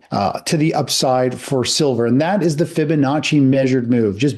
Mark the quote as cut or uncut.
uncut